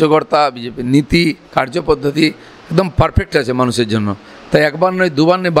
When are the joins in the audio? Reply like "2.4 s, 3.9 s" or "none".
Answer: none

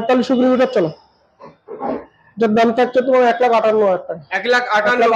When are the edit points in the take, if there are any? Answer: 2.2 s

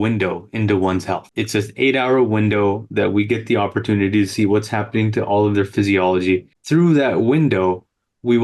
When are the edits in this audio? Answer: 1.3 s, 6.5 s

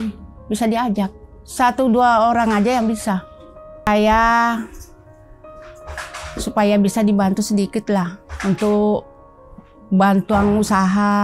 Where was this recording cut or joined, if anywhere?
3.9 s

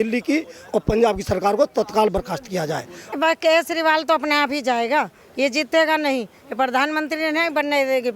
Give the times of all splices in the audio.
3.1 s

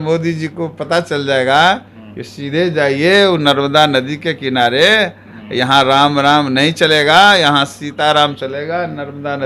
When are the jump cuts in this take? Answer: none

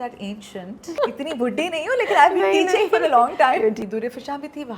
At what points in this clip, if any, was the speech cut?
1.0 s, 3.8 s

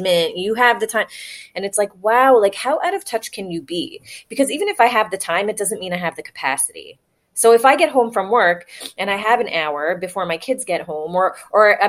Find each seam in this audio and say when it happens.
none

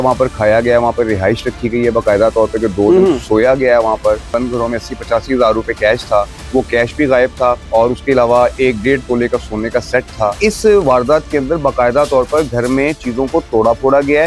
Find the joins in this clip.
4.3 s, 6.4 s, 7.6 s, 10.4 s

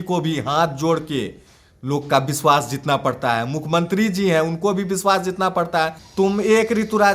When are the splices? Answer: 6.0 s

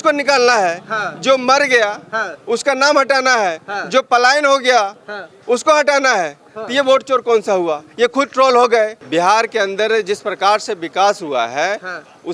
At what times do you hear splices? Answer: 9.0 s

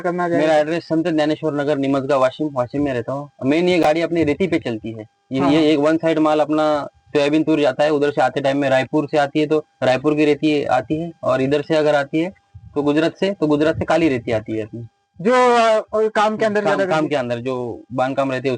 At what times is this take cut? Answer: none

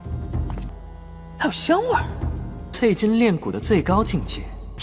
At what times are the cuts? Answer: none

